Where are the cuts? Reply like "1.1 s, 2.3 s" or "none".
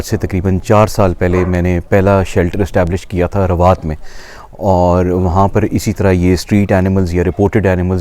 none